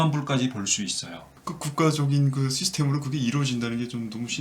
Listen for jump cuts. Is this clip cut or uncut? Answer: cut